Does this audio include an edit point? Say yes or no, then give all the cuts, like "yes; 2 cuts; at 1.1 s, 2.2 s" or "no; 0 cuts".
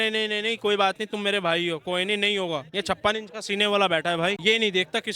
no; 0 cuts